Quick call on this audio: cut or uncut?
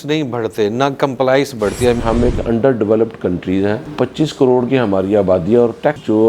cut